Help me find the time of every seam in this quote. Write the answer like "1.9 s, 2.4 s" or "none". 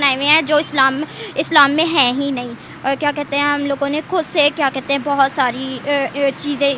none